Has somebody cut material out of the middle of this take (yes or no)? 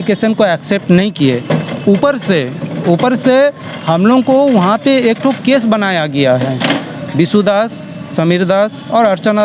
no